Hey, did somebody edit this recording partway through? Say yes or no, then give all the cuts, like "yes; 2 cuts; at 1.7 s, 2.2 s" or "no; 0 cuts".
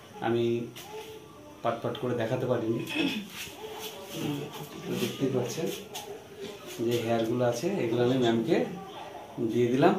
no; 0 cuts